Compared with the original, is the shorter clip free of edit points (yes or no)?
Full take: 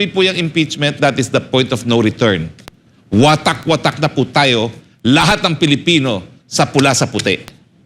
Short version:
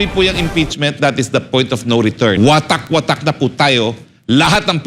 no